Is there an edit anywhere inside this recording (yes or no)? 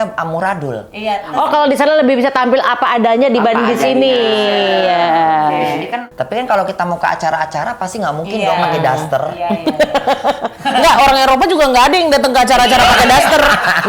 yes